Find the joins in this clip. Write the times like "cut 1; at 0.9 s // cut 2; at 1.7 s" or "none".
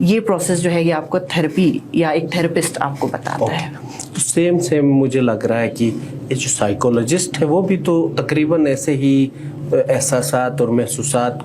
none

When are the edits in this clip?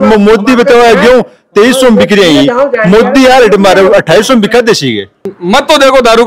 cut 1; at 5.3 s

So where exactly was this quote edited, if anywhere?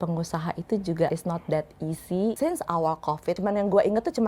cut 1; at 1.1 s // cut 2; at 2.4 s // cut 3; at 3.4 s

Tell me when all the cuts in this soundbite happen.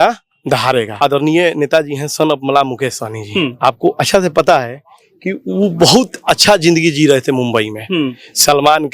cut 1; at 0.9 s

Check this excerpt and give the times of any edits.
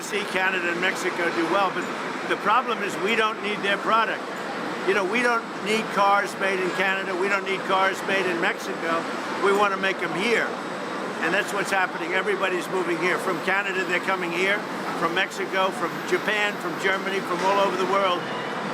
none

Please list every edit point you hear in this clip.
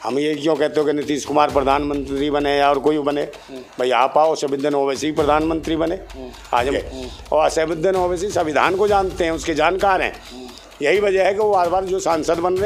cut 1; at 6.8 s

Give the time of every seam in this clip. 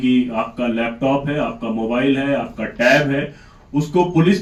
none

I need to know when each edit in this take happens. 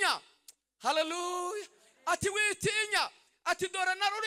none

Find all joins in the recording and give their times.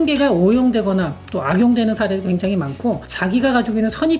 cut 1; at 3.1 s

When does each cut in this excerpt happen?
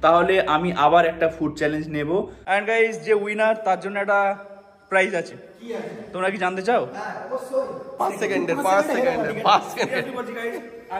cut 1; at 2.4 s // cut 2; at 7.9 s

